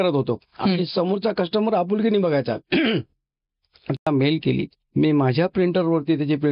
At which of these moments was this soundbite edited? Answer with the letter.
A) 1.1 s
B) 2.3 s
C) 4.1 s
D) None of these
C